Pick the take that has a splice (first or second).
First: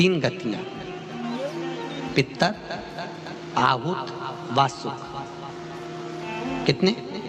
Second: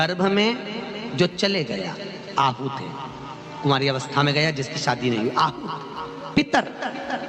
second